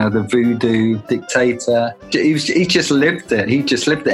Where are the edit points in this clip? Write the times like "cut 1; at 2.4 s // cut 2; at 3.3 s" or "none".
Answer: cut 1; at 1.1 s // cut 2; at 2.1 s

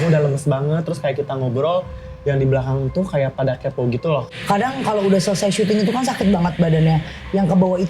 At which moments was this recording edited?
cut 1; at 4.3 s

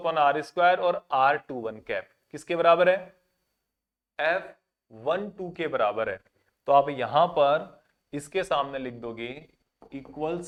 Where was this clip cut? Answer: none

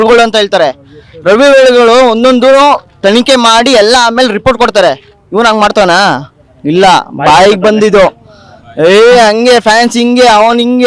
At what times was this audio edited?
none

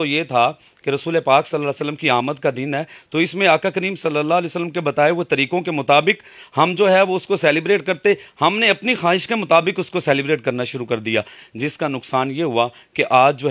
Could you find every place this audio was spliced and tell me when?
none

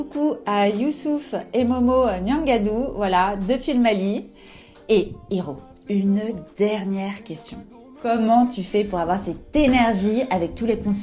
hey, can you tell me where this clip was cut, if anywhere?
none

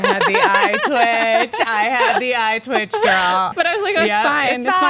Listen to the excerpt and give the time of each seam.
cut 1; at 3.5 s

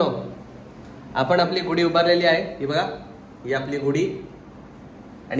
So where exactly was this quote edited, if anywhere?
none

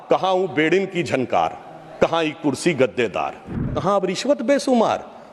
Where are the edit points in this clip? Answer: cut 1; at 3.7 s

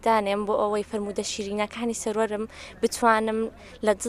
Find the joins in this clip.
none

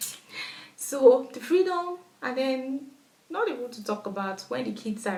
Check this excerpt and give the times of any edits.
none

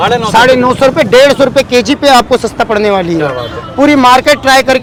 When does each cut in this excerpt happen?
none

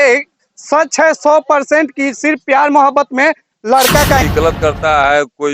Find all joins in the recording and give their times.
cut 1; at 4.2 s

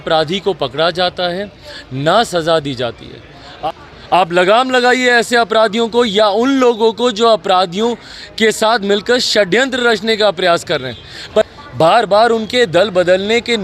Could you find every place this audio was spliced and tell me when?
cut 1; at 3.5 s // cut 2; at 11.5 s

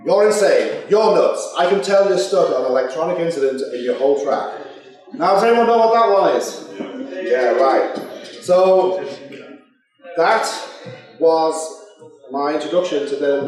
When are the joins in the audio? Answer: cut 1; at 3.4 s

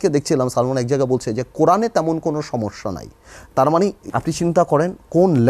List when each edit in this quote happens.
cut 1; at 4.0 s

